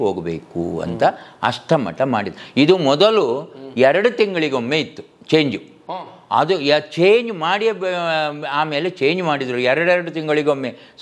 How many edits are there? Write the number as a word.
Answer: zero